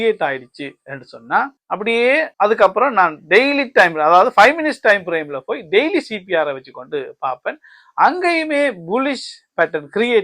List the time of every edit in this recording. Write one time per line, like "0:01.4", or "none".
0:02.1